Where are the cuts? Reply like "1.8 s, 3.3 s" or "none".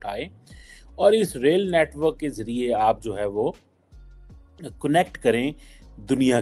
none